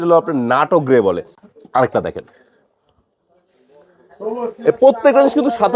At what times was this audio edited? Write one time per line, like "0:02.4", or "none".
0:01.3